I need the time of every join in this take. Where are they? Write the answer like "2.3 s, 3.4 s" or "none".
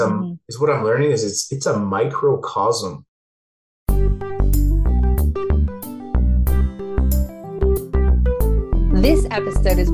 3.5 s